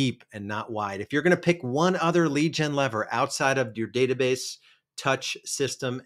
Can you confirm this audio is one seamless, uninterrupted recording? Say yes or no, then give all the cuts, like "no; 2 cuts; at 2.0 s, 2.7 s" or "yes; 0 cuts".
yes; 0 cuts